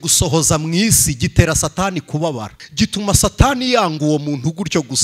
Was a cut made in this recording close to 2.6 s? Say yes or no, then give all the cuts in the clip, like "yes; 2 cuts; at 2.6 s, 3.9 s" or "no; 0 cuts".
yes; 1 cut; at 2.6 s